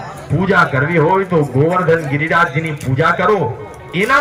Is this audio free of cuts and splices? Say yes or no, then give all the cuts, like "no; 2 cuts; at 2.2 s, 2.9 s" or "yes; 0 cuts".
yes; 0 cuts